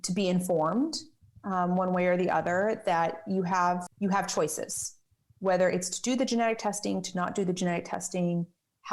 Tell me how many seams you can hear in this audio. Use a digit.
1